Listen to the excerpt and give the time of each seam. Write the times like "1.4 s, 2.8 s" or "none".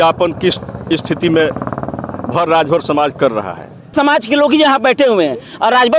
3.9 s